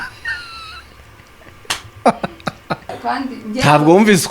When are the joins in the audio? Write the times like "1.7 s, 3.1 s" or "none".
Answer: 2.9 s